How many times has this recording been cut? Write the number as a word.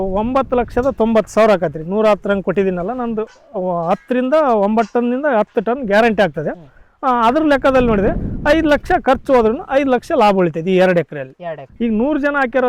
one